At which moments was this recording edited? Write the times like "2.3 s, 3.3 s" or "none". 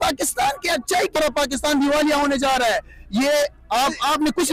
none